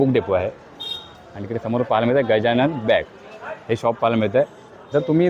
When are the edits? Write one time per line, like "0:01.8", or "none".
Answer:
none